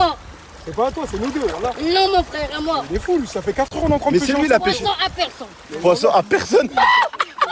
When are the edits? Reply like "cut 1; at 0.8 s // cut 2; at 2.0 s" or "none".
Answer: cut 1; at 3.7 s